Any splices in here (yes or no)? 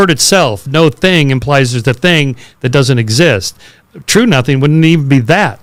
no